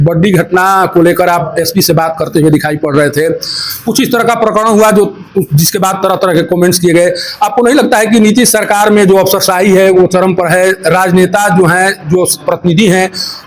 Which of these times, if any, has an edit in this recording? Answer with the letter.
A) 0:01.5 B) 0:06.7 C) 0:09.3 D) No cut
D